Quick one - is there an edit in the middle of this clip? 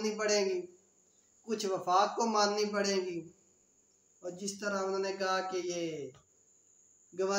no; 0 cuts

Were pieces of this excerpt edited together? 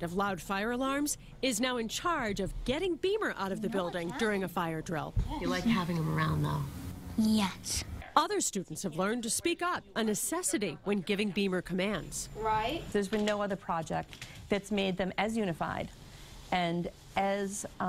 no; 0 cuts

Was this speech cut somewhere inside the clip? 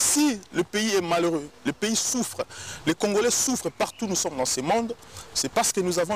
no; 0 cuts

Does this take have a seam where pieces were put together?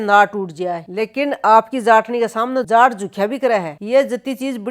yes; 1 cut; at 3.7 s

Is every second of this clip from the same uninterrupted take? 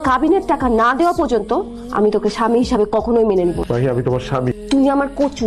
no; 2 cuts; at 3.6 s, 4.6 s

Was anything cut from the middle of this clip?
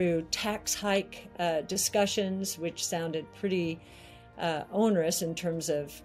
no; 0 cuts

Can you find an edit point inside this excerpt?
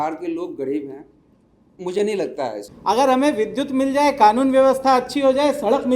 yes; 1 cut; at 2.7 s

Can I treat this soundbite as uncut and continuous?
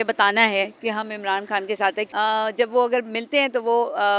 no; 1 cut; at 2.1 s

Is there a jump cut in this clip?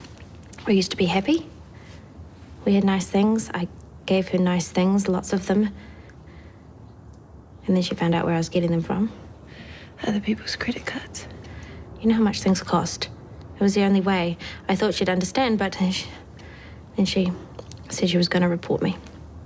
no; 0 cuts

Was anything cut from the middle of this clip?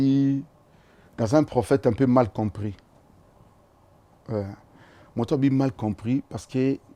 no; 0 cuts

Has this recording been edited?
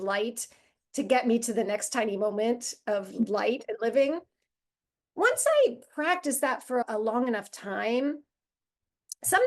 yes; 1 cut; at 6.8 s

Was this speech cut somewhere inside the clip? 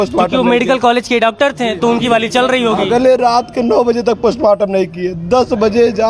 no; 0 cuts

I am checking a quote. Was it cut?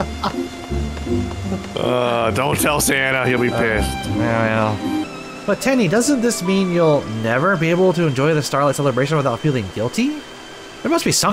yes; 1 cut; at 5.1 s

